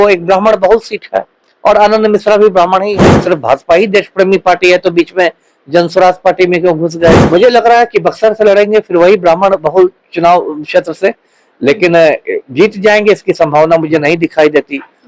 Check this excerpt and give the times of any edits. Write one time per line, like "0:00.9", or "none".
0:03.1
0:07.2